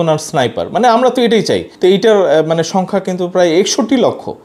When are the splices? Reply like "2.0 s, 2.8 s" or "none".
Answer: 1.7 s